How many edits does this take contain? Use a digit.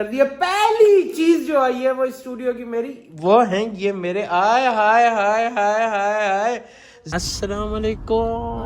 1